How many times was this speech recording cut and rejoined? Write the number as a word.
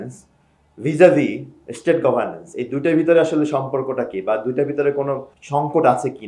one